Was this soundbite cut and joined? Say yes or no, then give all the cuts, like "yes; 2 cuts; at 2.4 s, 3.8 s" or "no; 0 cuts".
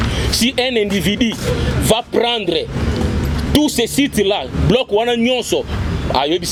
no; 0 cuts